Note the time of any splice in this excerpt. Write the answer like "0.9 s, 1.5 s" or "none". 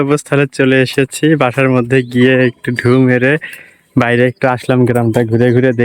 none